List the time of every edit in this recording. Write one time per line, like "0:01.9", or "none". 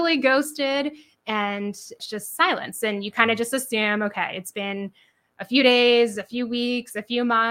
0:02.0